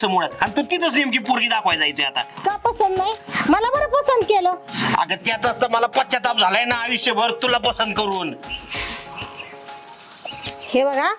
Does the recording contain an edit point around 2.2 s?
no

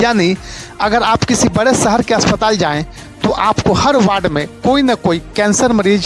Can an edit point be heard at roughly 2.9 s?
no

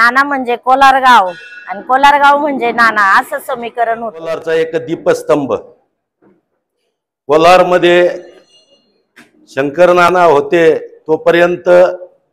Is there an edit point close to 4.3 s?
yes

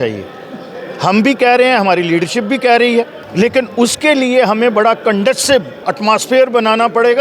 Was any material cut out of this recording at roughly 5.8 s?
no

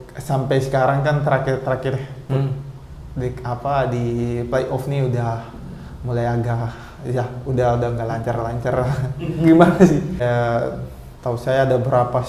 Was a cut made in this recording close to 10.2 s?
yes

